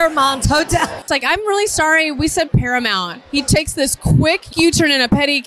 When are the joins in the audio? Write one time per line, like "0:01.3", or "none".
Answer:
0:01.0
0:04.5